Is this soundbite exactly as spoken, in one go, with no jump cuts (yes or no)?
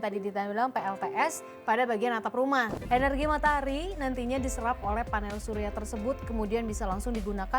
no